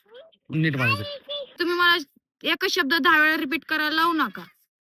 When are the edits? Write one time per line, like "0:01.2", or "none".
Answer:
0:01.6